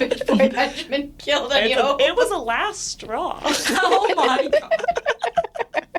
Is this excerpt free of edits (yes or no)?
yes